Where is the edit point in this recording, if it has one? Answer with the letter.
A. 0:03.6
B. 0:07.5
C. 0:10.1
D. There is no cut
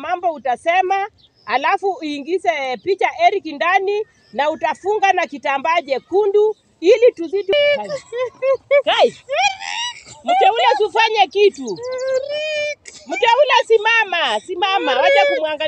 B